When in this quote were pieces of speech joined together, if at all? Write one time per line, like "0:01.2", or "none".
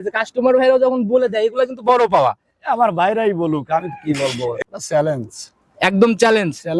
0:04.6